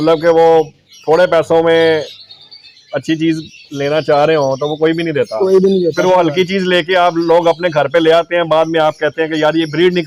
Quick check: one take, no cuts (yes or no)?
yes